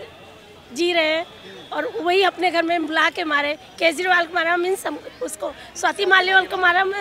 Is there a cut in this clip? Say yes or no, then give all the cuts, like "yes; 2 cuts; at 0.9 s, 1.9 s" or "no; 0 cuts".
no; 0 cuts